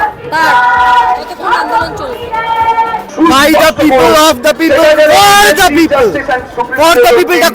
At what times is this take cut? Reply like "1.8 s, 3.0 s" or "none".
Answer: 3.1 s